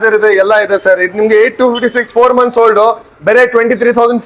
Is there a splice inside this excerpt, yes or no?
no